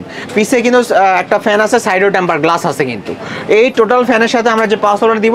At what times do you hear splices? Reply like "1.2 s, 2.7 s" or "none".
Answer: none